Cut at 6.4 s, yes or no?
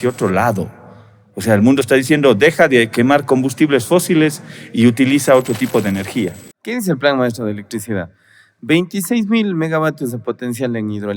yes